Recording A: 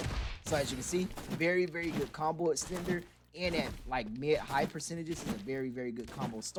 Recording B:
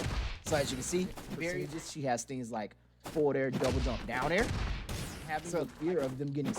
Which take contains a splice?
B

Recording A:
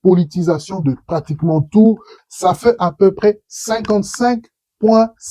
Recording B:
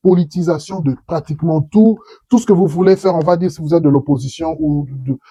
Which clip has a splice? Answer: A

